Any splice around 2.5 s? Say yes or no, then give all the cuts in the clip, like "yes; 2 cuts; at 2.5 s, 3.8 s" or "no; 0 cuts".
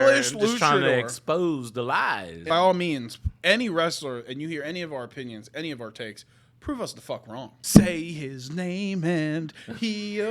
yes; 2 cuts; at 2.5 s, 7.6 s